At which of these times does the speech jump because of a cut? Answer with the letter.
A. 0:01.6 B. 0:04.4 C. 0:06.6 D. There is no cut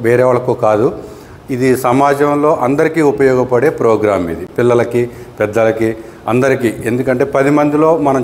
D